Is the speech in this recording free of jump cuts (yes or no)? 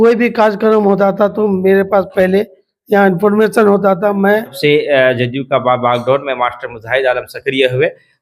no